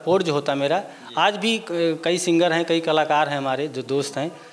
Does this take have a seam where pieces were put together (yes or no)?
no